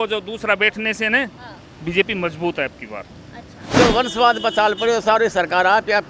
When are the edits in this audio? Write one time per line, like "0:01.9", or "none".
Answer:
0:03.8